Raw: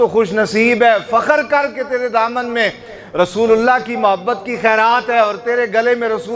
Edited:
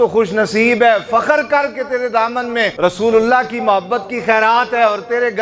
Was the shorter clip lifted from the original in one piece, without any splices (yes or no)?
no